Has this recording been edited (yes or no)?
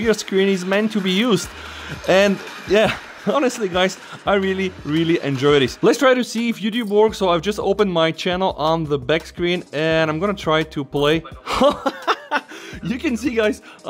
yes